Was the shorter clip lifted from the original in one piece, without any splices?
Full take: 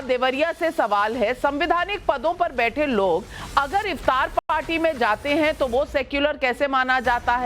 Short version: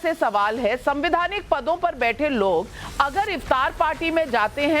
no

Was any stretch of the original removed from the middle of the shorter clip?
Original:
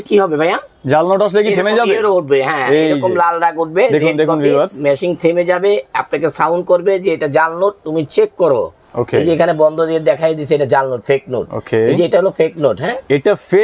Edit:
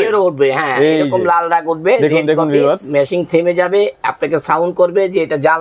no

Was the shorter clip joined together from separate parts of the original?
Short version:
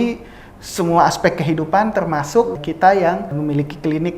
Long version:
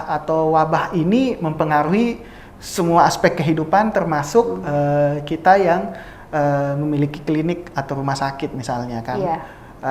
yes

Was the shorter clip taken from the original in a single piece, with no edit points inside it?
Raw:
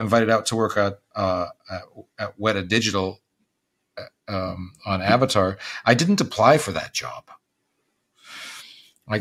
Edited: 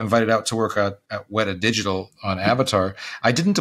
no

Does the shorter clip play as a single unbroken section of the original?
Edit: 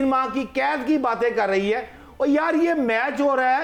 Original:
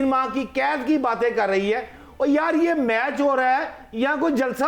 yes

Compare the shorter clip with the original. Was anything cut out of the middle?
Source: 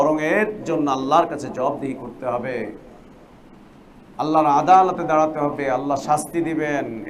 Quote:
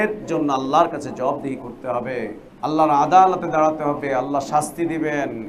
yes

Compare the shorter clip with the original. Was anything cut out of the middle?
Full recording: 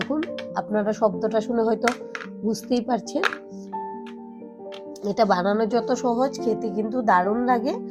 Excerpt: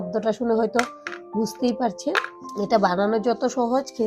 yes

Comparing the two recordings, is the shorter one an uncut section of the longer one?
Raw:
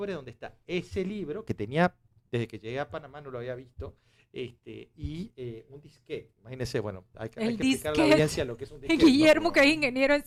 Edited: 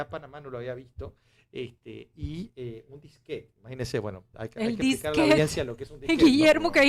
yes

